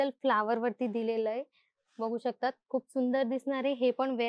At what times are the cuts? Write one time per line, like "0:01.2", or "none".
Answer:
none